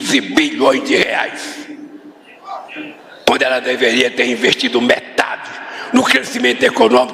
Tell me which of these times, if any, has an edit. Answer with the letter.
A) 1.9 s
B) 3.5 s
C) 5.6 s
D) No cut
A